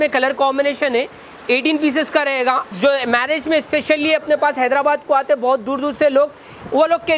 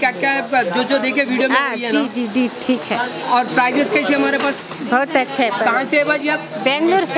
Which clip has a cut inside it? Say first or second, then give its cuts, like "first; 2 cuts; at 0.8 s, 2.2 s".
first; 1 cut; at 2.7 s